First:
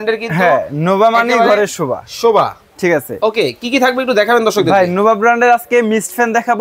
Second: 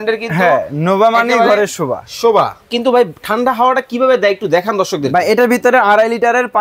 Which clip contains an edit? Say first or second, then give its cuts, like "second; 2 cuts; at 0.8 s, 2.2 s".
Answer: second; 1 cut; at 2.7 s